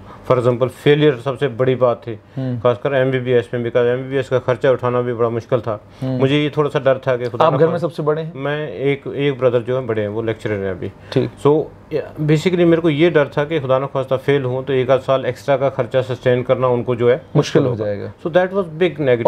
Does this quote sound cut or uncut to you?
uncut